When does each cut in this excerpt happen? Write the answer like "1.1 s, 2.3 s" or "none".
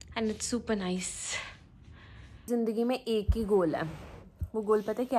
2.5 s